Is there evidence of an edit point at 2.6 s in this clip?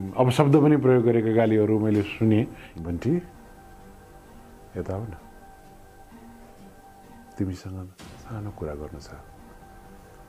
yes; 2 cuts; at 2.6 s, 9.1 s

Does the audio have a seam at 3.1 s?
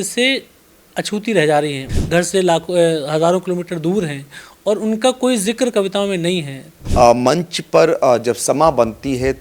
no; 2 cuts; at 1.8 s, 6.7 s

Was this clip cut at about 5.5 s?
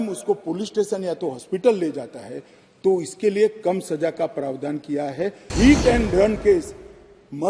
yes; 1 cut; at 5.5 s

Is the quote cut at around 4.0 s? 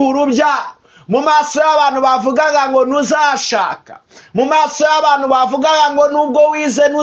no; 0 cuts

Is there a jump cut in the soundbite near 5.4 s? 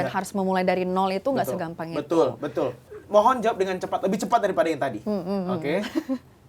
no; 1 cut; at 2.8 s

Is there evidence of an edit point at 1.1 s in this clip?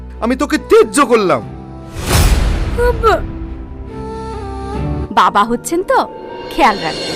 no; 1 cut; at 5.0 s

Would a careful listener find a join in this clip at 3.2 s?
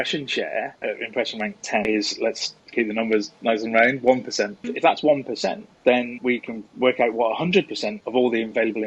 no; 2 cuts; at 1.9 s, 6.1 s

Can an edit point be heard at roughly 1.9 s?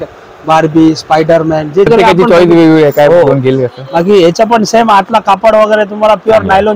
yes; 1 cut; at 1.9 s

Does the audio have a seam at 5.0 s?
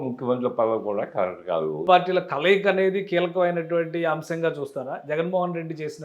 no; 1 cut; at 1.8 s

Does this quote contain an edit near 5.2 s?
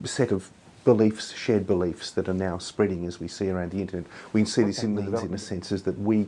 yes; 1 cut; at 5.2 s

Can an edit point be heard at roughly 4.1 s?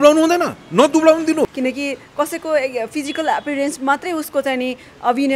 no; 1 cut; at 1.5 s

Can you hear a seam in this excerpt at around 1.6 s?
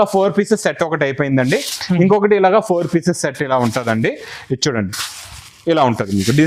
no; 0 cuts

